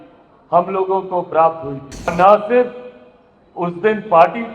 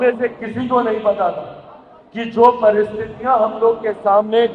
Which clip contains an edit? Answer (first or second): first